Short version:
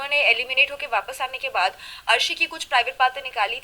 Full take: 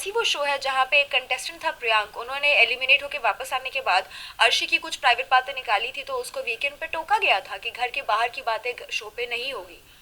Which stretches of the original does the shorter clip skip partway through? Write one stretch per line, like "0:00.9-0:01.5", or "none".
none